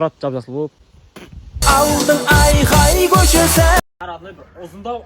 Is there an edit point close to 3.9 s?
yes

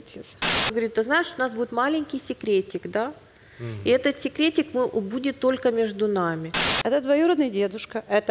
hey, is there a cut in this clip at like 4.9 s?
no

